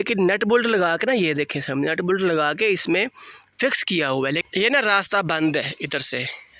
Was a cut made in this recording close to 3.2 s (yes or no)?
no